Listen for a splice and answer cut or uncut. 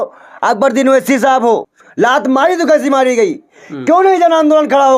cut